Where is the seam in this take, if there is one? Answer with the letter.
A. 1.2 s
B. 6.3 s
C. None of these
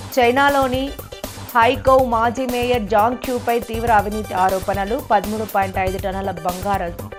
C